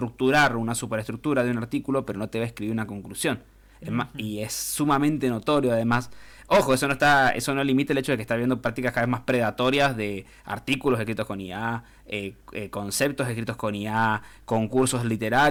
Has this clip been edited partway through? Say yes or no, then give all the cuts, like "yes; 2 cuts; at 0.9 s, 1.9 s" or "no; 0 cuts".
no; 0 cuts